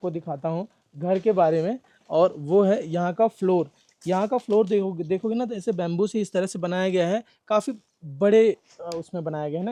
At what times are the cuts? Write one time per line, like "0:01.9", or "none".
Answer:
none

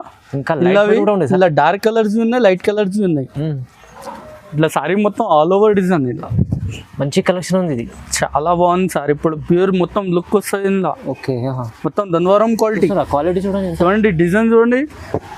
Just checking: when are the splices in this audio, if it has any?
none

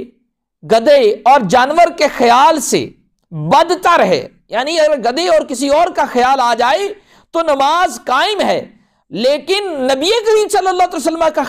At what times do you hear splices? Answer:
none

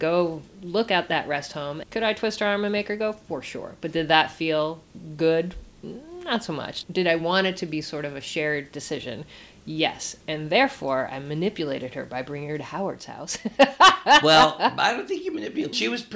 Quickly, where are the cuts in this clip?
none

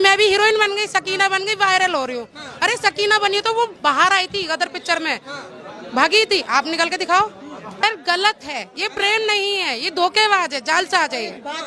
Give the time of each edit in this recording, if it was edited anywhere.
none

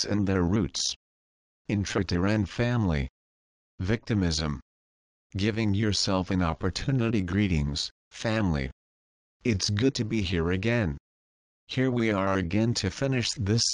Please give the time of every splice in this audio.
none

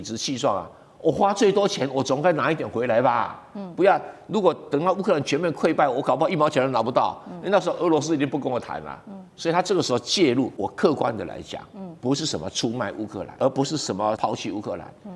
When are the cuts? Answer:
0:10.5
0:13.3
0:14.2

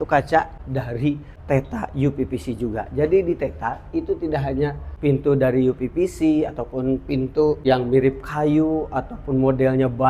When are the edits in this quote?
0:00.9
0:04.9
0:07.6

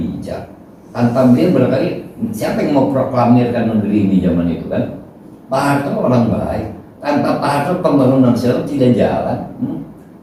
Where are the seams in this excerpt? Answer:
none

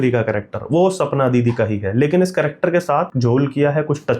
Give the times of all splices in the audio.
0:03.1

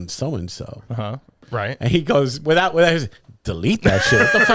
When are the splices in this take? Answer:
0:01.4

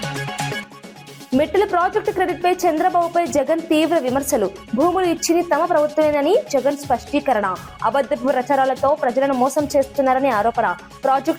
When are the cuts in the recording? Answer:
none

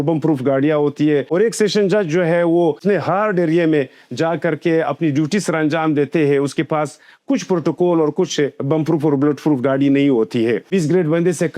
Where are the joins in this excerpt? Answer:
0:01.3
0:02.8
0:10.7

